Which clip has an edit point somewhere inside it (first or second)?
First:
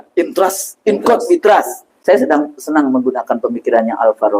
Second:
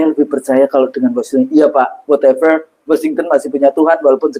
first